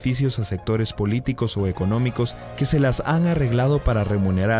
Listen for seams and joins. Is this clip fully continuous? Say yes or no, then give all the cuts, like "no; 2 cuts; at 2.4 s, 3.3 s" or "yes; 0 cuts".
no; 1 cut; at 1.1 s